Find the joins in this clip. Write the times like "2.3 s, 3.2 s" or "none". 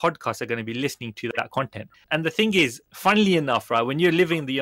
1.8 s